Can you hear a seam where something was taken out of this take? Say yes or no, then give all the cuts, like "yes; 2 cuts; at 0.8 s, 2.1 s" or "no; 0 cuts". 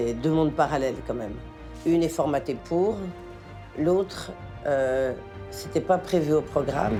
no; 0 cuts